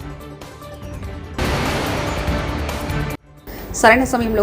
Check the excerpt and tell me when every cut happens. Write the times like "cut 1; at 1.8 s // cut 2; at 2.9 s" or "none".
cut 1; at 1.4 s // cut 2; at 3.3 s